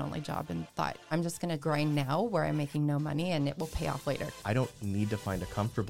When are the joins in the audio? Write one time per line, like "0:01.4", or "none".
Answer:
0:01.5
0:04.3